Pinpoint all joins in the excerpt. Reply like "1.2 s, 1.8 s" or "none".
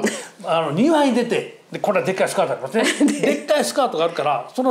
none

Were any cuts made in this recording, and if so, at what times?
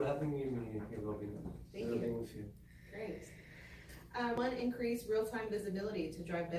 4.4 s

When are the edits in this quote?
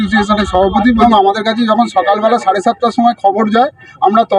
1.0 s

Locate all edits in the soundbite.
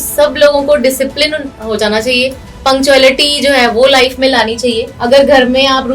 4.9 s

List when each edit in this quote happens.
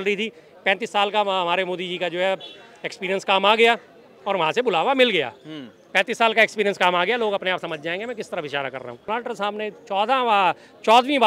9.1 s

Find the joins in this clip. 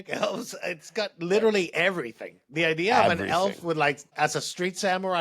4.1 s

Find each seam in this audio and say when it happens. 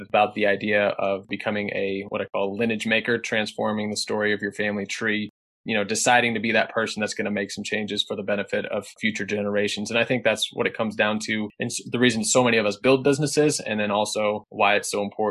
1.3 s

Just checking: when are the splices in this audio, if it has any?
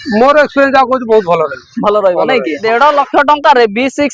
2.6 s

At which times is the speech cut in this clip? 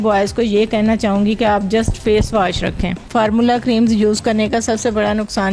3.1 s

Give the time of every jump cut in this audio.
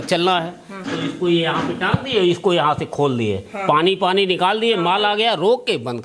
none

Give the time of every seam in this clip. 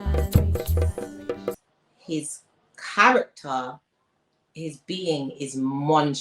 1.6 s

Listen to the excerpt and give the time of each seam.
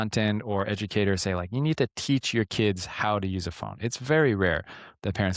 none

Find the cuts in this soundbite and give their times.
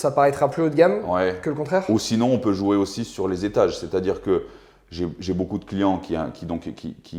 none

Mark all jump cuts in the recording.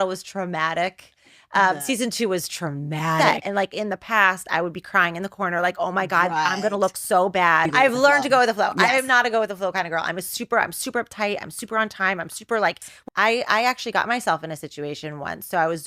3.2 s, 7.7 s, 12.9 s

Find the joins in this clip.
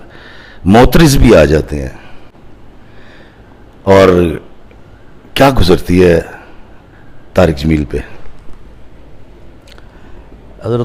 none

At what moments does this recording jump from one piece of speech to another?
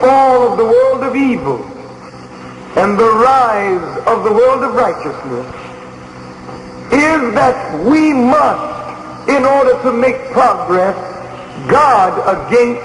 7.9 s

